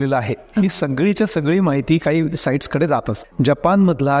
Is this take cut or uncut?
cut